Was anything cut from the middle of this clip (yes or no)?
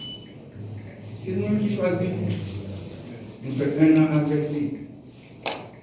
no